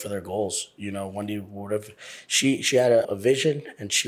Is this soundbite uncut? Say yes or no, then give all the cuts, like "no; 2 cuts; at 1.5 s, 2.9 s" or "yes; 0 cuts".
yes; 0 cuts